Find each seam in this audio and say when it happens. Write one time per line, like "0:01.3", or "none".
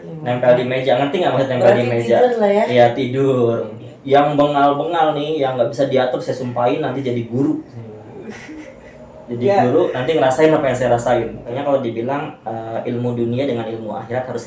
0:03.9
0:11.5